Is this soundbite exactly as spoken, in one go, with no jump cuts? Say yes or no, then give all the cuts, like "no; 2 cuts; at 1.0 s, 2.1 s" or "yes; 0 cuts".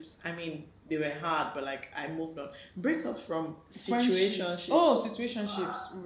yes; 0 cuts